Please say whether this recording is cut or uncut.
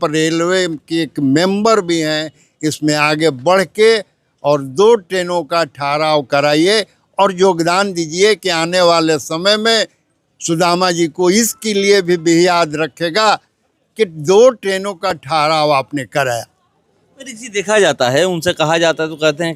uncut